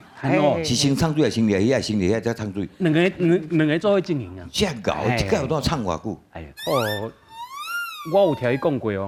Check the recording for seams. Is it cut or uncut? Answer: uncut